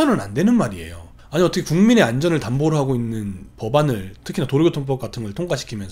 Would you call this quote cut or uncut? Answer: uncut